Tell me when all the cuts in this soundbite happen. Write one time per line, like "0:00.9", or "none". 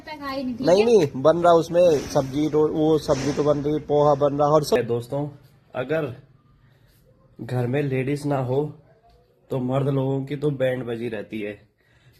0:04.8